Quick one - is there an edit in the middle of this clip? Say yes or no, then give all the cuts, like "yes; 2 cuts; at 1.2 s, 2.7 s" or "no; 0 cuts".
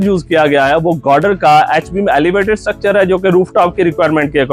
no; 0 cuts